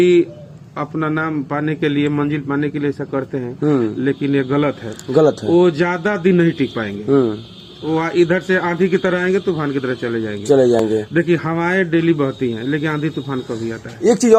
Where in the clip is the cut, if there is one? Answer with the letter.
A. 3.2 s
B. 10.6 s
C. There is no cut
C